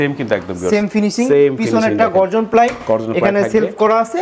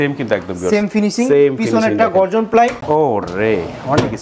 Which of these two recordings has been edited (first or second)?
second